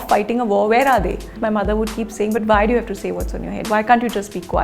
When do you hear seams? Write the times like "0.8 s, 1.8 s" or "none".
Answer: 1.4 s